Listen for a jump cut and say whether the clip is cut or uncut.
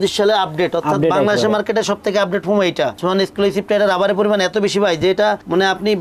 cut